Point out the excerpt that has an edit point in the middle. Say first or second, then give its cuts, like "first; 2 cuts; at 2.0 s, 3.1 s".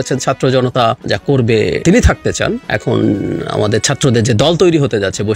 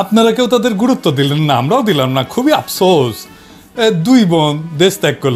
first; 3 cuts; at 1.0 s, 1.8 s, 2.6 s